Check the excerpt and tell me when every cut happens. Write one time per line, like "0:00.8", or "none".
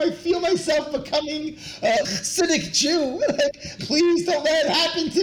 0:03.7